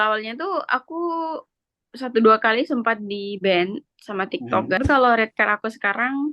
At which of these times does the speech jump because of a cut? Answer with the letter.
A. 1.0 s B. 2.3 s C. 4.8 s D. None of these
C